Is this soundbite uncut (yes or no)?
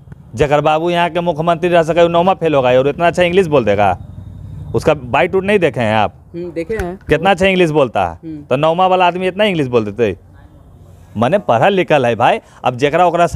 yes